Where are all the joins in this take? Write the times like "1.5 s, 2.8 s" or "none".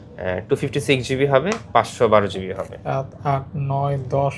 2.8 s

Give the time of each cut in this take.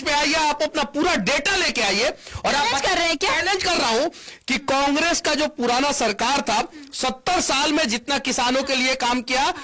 none

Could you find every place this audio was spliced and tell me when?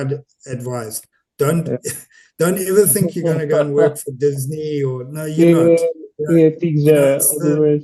none

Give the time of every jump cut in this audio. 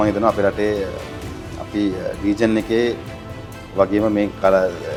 none

